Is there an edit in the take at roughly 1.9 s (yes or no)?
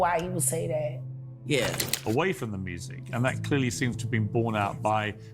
yes